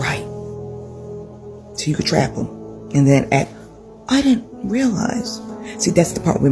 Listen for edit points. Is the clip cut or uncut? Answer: uncut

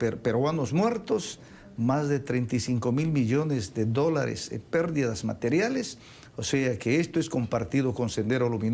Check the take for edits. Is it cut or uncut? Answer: cut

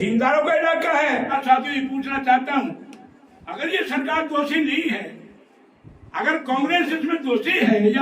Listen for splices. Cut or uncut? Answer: cut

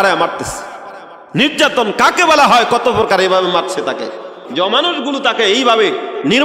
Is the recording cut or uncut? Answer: cut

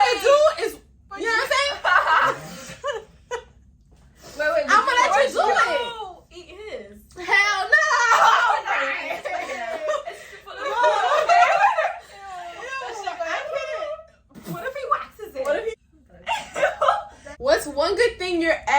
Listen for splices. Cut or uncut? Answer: cut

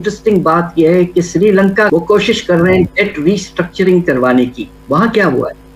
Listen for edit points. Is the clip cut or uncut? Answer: uncut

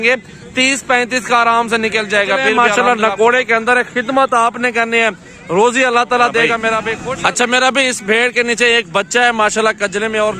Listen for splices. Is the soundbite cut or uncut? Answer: cut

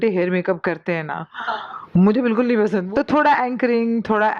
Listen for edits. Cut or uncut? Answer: cut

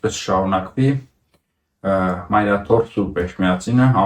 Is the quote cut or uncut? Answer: uncut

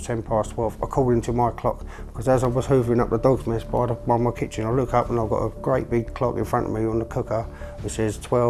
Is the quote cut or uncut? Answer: uncut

